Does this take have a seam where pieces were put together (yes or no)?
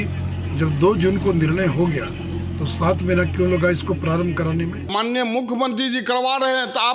yes